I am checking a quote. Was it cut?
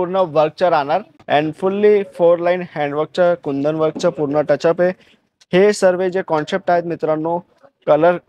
yes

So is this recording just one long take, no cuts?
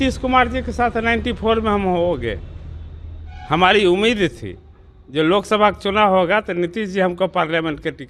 yes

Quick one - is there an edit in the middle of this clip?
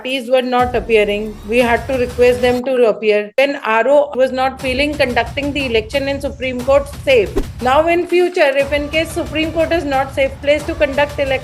yes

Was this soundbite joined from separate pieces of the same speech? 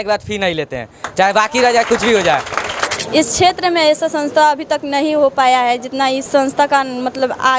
yes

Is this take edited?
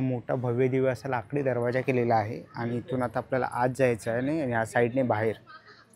no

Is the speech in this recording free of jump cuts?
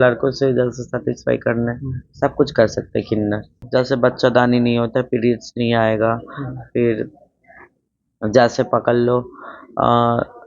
no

